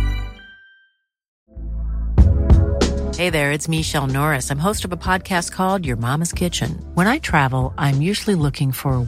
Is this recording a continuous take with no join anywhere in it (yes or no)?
no